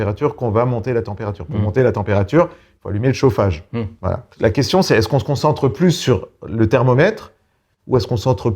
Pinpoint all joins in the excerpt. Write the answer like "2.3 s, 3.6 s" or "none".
4.3 s